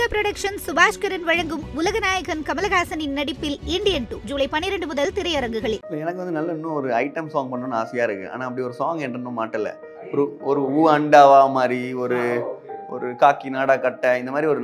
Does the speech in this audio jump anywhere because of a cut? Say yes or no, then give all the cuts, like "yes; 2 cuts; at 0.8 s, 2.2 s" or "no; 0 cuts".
yes; 1 cut; at 5.9 s